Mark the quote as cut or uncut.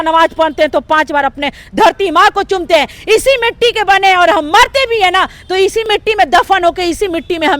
cut